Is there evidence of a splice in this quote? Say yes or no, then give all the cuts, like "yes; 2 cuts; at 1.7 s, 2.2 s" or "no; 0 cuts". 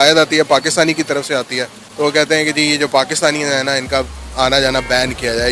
no; 0 cuts